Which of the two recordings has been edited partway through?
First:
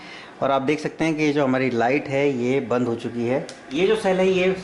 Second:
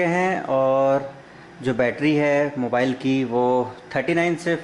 first; 1 cut; at 3.7 s

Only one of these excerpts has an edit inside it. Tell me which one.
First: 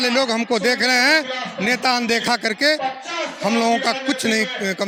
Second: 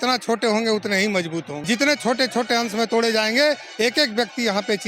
second; 1 cut; at 1.5 s

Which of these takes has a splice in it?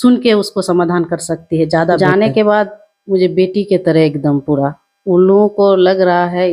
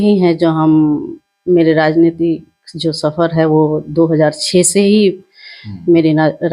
first; 1 cut; at 2.0 s

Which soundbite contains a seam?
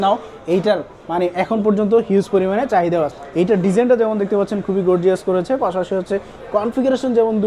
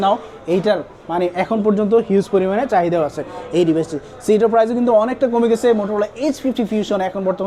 first; 1 cut; at 3.2 s

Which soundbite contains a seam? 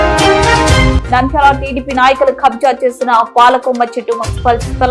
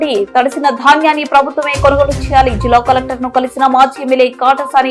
first; 1 cut; at 0.9 s

